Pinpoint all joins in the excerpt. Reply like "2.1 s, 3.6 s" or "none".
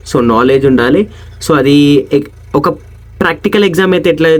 none